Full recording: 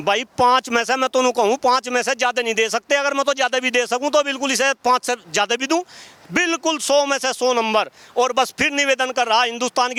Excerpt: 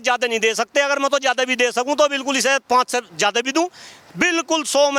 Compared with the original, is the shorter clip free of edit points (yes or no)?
yes